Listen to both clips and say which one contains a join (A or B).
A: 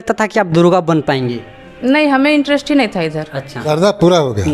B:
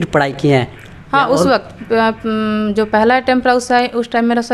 A